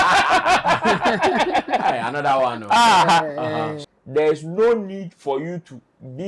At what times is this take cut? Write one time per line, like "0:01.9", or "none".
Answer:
0:03.7